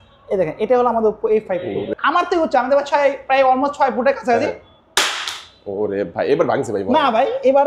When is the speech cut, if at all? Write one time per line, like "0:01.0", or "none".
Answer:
0:01.9